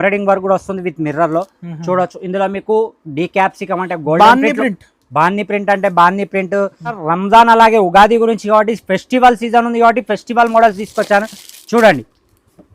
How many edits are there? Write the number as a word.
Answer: one